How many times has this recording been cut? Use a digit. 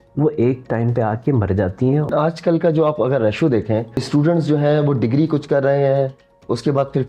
2